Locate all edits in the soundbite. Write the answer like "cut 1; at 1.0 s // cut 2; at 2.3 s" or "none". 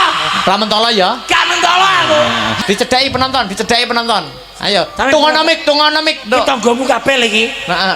cut 1; at 2.6 s